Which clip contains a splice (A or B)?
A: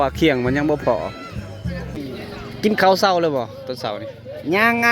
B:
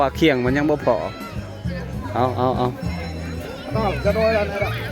A